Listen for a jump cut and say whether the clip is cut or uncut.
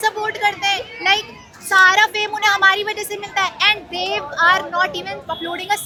uncut